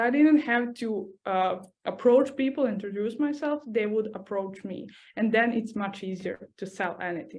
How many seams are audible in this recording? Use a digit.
1